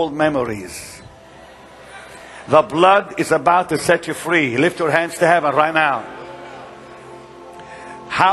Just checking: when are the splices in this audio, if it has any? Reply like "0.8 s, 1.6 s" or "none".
7.3 s